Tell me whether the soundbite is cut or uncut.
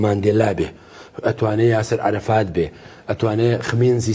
uncut